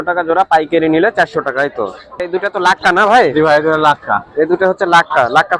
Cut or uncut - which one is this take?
cut